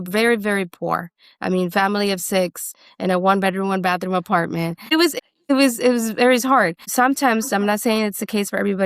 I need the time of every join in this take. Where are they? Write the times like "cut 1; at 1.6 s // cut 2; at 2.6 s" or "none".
cut 1; at 5.0 s